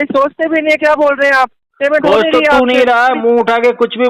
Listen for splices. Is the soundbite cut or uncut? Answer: uncut